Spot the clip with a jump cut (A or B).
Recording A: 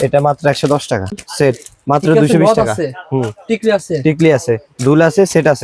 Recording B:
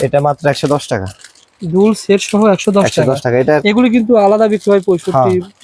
A